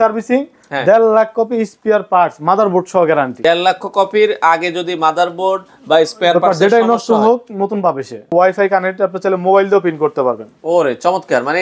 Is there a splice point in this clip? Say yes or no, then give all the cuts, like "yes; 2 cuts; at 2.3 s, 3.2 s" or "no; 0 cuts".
yes; 2 cuts; at 3.4 s, 8.3 s